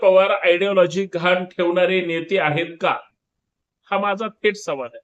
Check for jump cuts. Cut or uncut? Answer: uncut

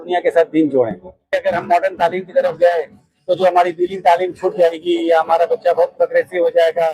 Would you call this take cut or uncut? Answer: cut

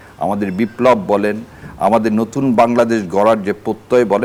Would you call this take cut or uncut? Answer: uncut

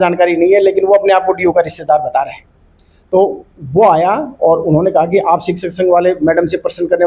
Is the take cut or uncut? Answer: uncut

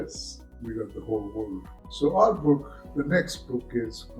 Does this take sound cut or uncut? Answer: cut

